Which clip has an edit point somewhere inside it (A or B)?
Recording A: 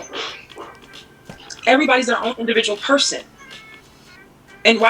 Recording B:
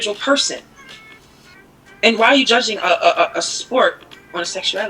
B